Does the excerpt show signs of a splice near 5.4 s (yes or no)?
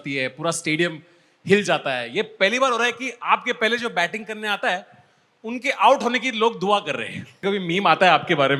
no